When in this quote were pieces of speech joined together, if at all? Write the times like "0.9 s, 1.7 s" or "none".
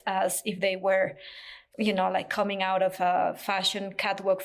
none